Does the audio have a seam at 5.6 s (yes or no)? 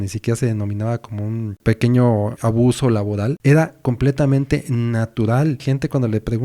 yes